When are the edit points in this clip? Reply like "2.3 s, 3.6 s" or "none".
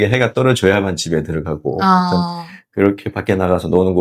none